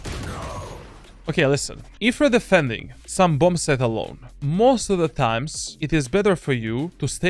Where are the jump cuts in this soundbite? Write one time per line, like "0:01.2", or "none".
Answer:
none